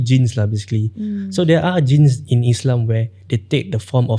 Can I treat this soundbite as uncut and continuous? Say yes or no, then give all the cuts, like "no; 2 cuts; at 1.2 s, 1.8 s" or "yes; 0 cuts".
no; 1 cut; at 2.2 s